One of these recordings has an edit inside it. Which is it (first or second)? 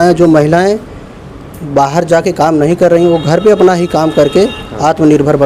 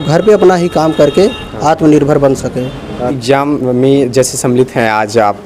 second